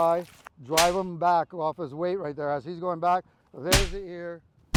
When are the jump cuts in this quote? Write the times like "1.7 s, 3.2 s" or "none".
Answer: none